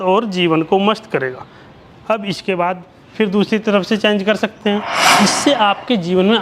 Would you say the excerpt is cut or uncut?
cut